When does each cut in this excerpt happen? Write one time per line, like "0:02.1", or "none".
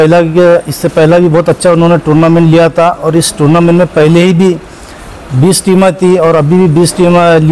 none